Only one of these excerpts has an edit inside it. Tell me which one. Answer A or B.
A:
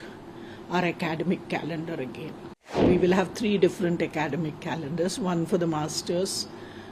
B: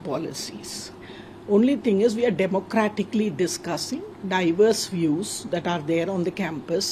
A